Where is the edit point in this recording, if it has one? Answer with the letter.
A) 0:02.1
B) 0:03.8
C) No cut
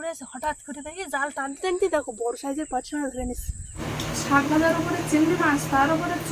B